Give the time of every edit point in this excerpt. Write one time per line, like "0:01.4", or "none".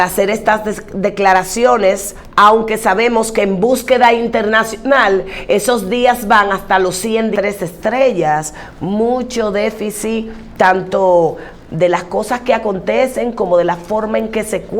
0:07.3

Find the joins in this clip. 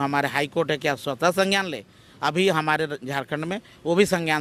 none

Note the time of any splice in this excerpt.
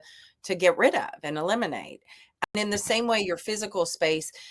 0:02.3

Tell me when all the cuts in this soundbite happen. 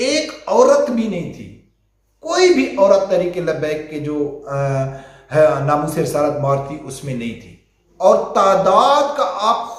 none

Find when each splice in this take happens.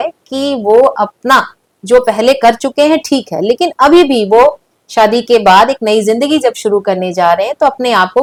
none

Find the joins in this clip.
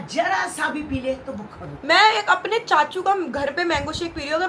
none

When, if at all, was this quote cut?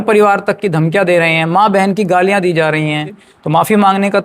0:03.2

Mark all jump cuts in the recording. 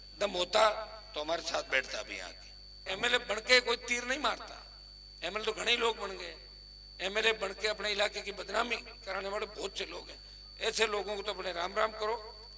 0:02.8

